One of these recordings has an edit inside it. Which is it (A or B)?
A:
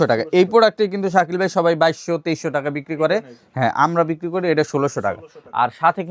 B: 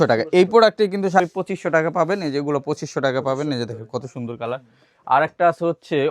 B